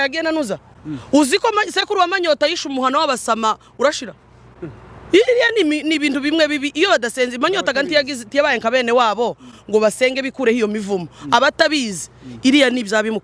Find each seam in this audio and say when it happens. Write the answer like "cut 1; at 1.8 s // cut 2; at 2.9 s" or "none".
none